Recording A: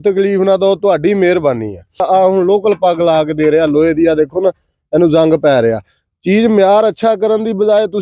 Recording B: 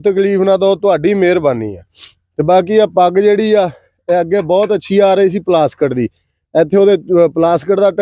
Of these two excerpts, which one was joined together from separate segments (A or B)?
A